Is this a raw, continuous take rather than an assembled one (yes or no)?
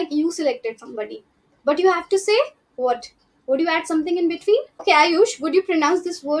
no